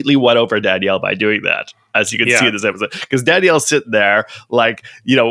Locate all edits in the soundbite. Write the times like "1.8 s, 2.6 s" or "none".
none